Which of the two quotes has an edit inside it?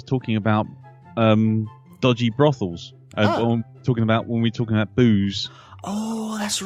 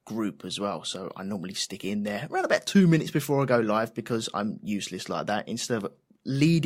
second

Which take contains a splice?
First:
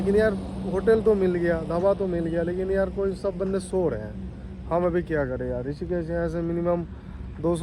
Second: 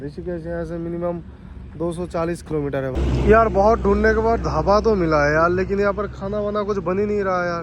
second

